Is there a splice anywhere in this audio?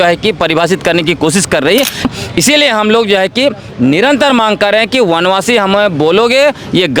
yes; 1 cut; at 2.1 s

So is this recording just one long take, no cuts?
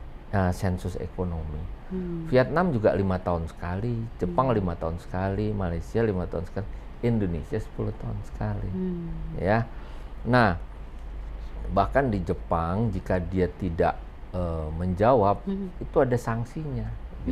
yes; 0 cuts

